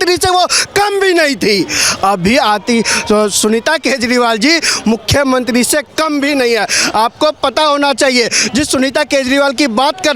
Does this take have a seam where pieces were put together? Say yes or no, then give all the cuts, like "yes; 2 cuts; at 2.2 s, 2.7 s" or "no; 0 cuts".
no; 0 cuts